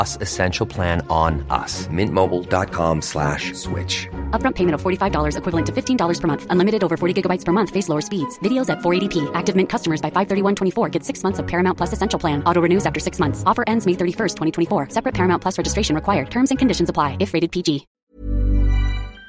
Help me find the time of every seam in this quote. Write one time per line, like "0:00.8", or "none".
0:17.9

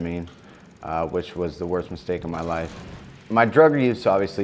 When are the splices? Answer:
0:02.8

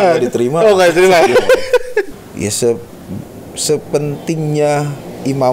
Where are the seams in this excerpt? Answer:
0:02.1

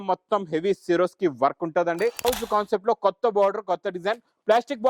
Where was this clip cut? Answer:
0:02.3

